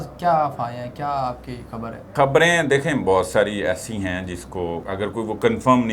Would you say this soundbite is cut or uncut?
cut